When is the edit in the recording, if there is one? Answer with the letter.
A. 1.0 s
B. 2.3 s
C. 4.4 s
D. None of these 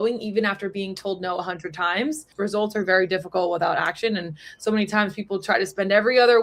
B